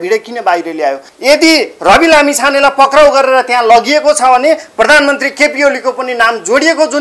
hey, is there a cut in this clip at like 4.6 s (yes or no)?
no